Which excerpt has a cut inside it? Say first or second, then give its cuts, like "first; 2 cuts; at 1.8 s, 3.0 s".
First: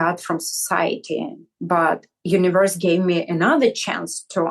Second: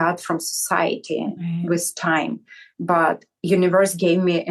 first; 1 cut; at 1.3 s